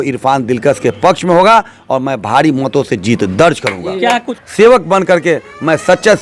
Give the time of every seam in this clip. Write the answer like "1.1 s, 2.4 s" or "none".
4.3 s